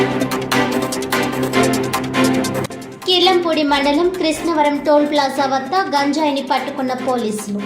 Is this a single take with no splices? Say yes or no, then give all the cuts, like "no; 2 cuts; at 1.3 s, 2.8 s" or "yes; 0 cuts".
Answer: no; 1 cut; at 2.6 s